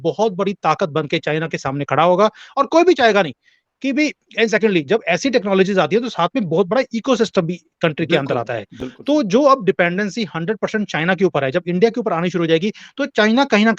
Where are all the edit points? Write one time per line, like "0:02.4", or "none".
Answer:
none